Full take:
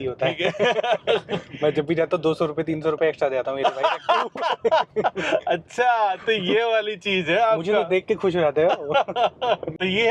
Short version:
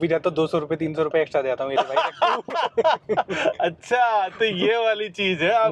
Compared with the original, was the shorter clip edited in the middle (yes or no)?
no